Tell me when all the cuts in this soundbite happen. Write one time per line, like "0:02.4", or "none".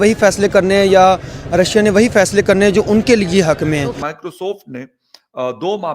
0:04.0